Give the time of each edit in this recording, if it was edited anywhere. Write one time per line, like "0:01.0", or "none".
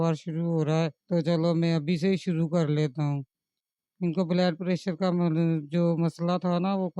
none